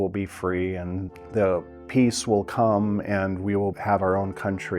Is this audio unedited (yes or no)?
no